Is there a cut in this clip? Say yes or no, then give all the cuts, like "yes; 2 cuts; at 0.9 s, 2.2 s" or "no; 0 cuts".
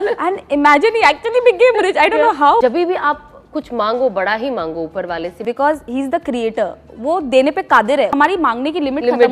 yes; 3 cuts; at 2.6 s, 5.4 s, 8.1 s